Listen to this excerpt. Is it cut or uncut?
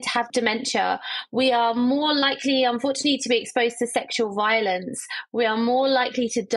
uncut